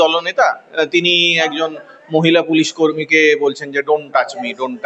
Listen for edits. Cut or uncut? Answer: uncut